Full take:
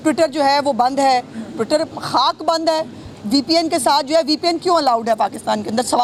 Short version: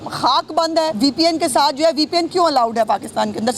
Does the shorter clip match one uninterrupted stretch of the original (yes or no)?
no